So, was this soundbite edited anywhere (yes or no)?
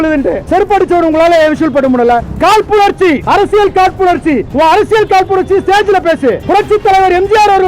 yes